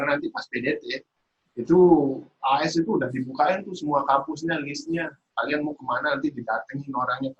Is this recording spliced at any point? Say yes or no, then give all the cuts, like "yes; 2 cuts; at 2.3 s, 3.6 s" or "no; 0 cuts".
no; 0 cuts